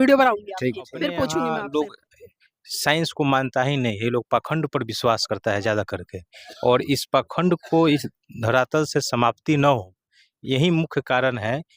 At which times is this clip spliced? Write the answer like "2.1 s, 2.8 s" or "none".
1.5 s